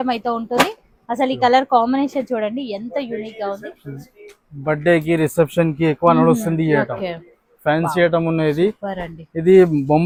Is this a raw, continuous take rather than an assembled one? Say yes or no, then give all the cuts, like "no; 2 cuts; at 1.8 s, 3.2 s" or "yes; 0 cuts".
yes; 0 cuts